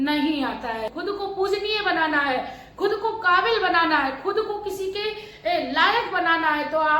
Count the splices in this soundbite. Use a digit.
1